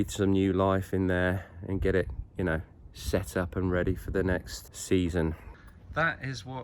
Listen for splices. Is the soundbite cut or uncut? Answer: cut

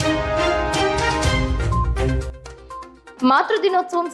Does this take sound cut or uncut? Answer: uncut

